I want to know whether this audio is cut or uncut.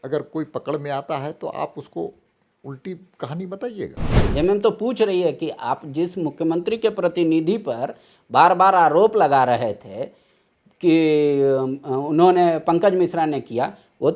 cut